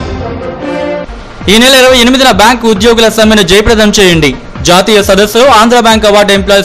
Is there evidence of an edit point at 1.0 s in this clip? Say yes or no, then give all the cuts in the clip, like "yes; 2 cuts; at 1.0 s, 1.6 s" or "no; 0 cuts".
yes; 1 cut; at 1.0 s